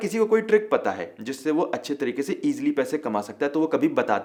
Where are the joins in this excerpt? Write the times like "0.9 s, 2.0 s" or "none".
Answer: none